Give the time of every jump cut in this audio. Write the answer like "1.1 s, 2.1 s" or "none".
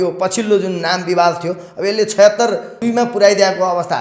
2.8 s